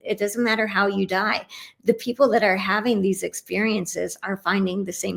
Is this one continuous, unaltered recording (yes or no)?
yes